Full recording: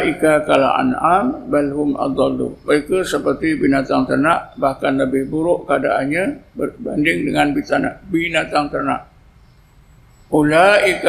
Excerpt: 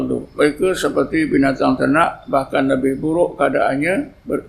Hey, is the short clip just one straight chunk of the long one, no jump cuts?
yes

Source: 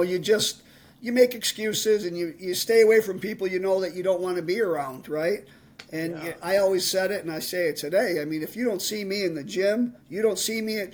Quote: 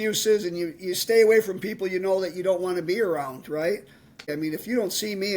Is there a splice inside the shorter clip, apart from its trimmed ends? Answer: yes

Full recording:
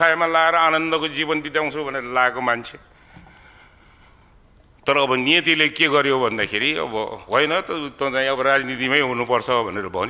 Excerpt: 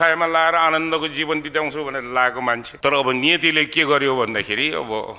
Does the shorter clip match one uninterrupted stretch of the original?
no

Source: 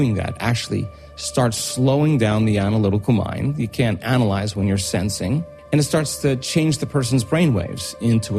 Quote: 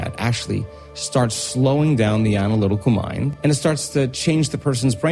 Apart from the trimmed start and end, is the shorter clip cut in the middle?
yes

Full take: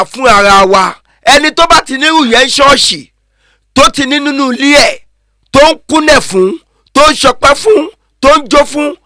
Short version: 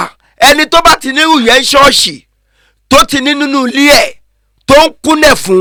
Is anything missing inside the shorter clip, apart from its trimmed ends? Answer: no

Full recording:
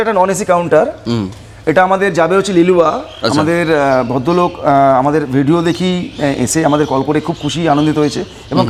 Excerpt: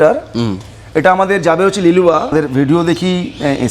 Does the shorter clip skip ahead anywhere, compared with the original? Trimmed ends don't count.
yes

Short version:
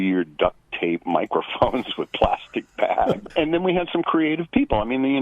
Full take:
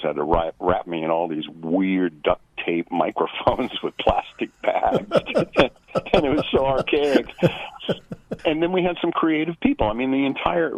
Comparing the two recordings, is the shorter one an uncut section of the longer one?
no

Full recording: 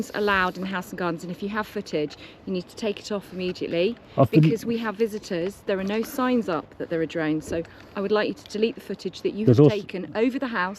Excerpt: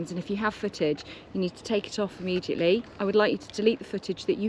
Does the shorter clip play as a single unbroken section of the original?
no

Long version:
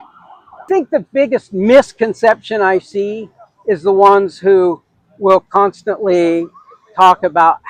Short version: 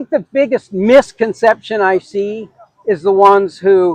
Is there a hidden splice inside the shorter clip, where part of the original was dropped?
no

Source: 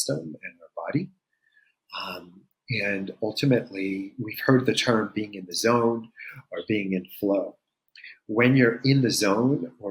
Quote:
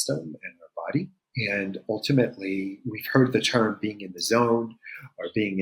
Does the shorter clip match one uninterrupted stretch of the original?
no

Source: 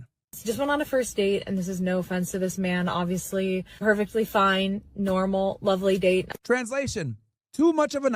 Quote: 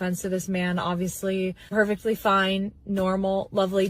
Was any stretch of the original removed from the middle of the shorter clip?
no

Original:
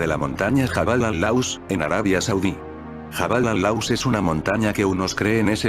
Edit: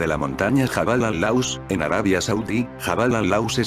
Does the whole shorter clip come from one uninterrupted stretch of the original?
no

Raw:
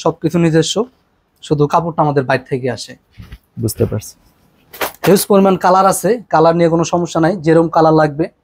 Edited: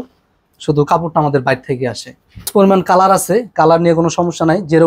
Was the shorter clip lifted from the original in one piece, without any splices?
no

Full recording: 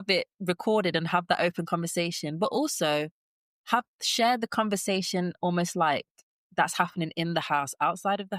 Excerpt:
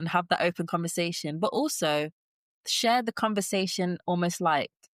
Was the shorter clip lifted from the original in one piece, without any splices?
no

